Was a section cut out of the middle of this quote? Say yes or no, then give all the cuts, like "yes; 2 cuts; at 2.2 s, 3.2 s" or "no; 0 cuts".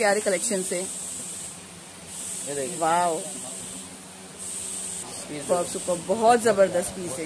yes; 1 cut; at 5.0 s